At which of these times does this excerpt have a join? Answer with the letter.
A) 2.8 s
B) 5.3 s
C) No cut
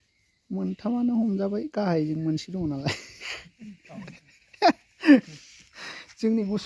B